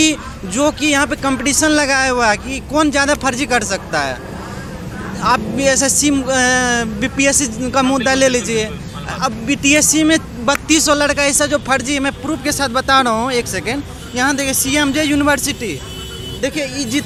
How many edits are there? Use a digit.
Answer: 0